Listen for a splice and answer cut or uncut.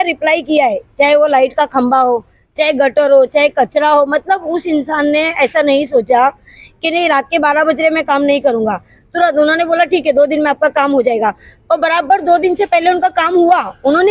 uncut